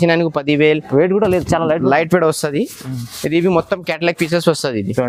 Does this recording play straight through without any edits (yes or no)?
yes